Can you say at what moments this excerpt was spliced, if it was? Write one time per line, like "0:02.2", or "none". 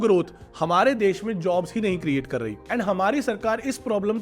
none